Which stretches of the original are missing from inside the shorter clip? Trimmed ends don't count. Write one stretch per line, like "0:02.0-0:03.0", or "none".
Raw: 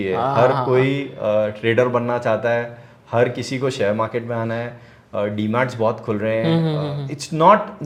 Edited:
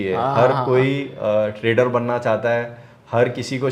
none